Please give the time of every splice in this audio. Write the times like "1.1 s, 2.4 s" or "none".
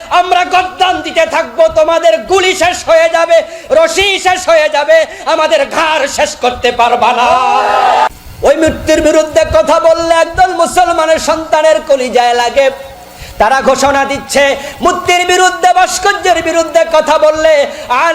8.1 s